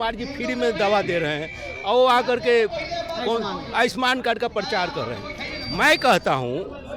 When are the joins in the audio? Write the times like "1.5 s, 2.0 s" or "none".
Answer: none